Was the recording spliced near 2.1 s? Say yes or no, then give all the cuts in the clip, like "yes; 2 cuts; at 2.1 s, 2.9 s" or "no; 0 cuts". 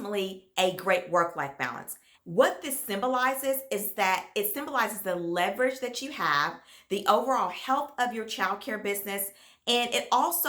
yes; 1 cut; at 2.1 s